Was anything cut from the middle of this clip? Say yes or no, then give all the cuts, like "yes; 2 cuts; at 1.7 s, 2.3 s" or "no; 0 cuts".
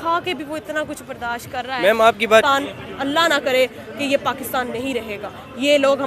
yes; 1 cut; at 2.2 s